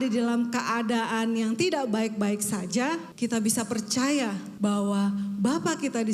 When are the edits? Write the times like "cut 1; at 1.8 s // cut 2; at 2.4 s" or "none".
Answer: cut 1; at 3.1 s // cut 2; at 4.5 s